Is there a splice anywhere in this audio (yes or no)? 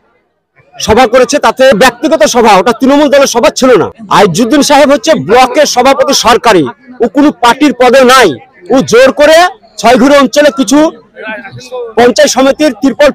yes